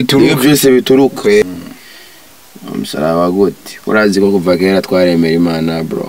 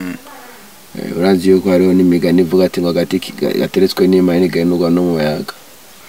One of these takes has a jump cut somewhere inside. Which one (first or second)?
first